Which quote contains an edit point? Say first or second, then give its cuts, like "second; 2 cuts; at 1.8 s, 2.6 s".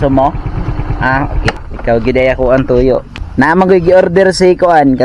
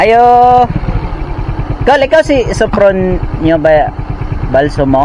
first; 2 cuts; at 1.7 s, 3.2 s